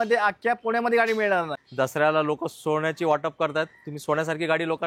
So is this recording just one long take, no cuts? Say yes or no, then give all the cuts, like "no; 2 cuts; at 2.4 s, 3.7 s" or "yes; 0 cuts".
no; 1 cut; at 1.6 s